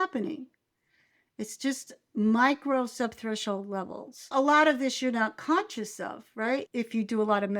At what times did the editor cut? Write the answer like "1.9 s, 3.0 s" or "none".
4.3 s, 6.7 s